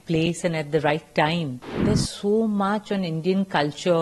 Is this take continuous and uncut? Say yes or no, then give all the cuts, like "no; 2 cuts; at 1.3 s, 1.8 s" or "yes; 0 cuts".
no; 1 cut; at 1.7 s